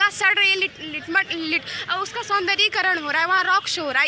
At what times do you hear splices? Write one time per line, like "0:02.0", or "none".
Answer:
none